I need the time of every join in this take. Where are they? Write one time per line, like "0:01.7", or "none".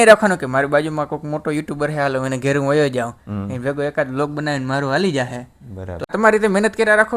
0:06.1